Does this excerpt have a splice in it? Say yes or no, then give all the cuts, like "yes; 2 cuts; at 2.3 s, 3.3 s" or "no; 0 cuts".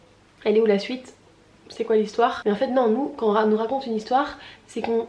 yes; 1 cut; at 2.4 s